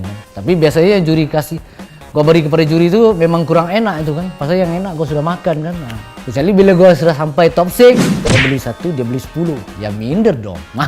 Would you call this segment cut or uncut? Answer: cut